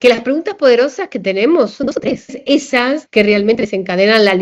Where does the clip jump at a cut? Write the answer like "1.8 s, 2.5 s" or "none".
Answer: 2.8 s